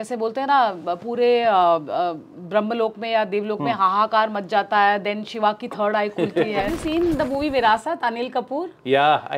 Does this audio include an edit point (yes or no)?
yes